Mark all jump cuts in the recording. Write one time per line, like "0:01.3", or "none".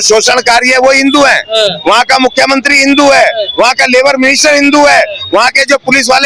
none

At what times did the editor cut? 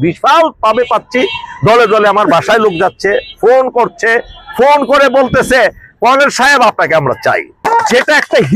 0:07.7

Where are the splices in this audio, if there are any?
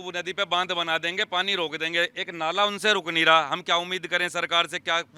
none

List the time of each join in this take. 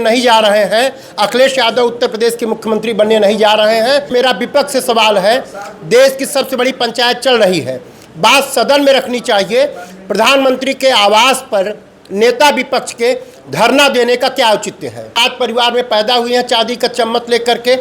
0:04.1
0:15.2

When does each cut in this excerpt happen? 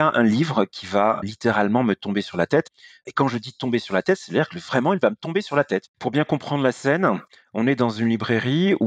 0:01.2
0:02.7

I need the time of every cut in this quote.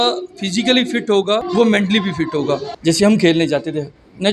0:02.7

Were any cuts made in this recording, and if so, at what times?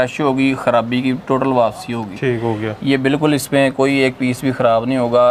none

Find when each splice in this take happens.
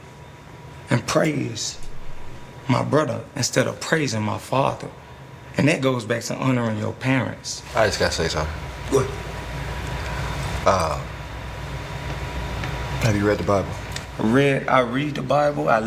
none

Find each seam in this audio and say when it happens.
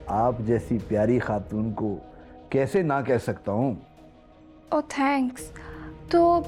none

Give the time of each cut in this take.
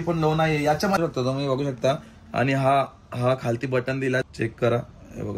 0:01.0
0:04.3

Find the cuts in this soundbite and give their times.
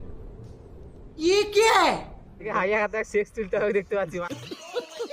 0:02.5
0:04.0

